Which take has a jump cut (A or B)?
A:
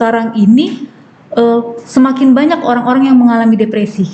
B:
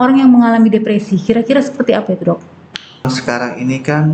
B